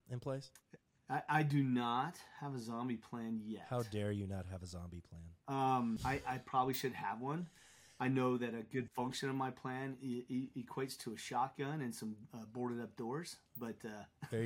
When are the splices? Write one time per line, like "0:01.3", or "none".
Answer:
0:06.0
0:08.9

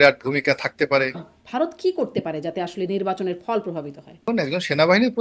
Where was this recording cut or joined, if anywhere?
0:01.4
0:04.2

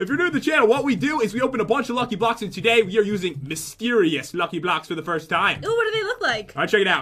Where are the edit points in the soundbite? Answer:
none

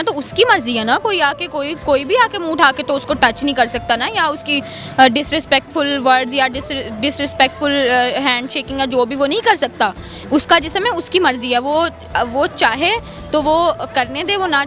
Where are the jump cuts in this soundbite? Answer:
none

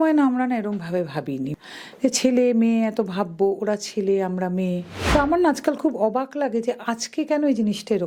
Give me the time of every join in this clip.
0:01.5
0:04.9

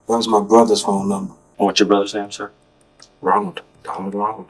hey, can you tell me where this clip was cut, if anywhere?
0:01.4

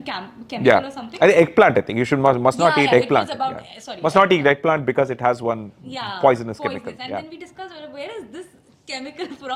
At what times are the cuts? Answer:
none

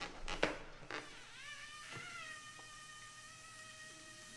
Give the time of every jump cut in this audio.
none

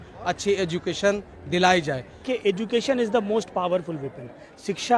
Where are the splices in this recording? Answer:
0:02.2

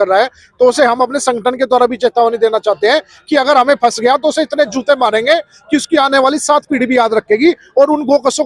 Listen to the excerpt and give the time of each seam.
none

